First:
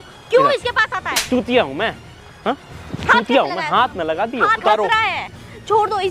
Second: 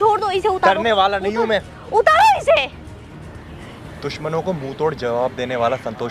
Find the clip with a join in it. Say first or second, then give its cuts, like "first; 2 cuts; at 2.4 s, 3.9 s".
first; 1 cut; at 4.6 s